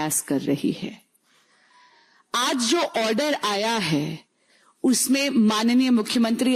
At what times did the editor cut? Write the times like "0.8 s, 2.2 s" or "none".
none